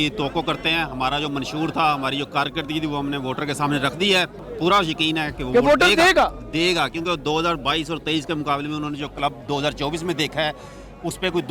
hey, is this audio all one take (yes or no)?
no